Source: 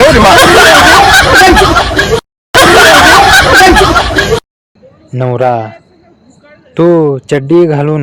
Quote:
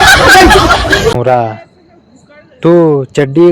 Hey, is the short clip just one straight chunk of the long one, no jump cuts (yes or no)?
no